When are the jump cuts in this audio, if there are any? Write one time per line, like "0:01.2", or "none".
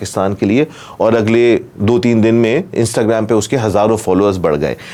none